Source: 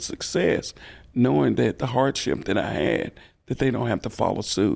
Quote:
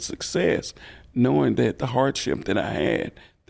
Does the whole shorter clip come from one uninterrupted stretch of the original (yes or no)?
yes